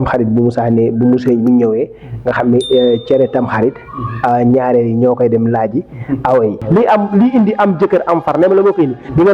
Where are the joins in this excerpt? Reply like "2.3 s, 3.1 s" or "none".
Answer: 6.6 s